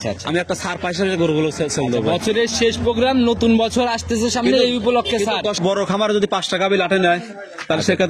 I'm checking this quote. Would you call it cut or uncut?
cut